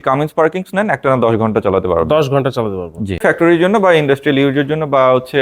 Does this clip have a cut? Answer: yes; 1 cut; at 3.2 s

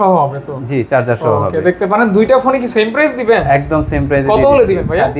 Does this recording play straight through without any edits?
yes; 0 cuts

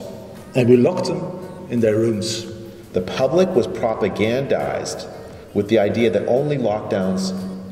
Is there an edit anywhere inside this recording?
yes; 1 cut; at 2.8 s

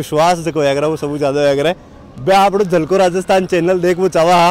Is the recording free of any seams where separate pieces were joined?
yes; 0 cuts

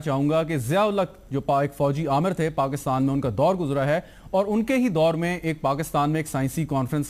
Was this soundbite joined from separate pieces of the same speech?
no; 0 cuts

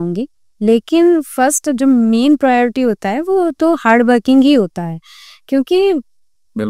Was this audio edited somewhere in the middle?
no; 0 cuts

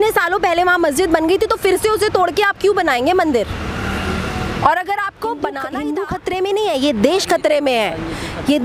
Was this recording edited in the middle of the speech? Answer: yes; 1 cut; at 5.6 s

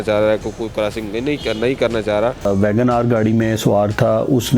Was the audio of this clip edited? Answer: yes; 1 cut; at 2.5 s

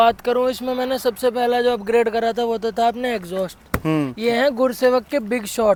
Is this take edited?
no; 0 cuts

